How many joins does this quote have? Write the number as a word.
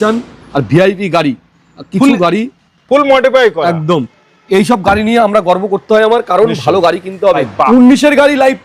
one